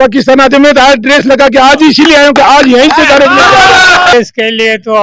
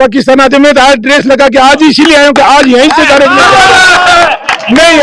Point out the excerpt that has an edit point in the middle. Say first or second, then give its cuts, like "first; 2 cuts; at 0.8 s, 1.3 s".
first; 1 cut; at 4.1 s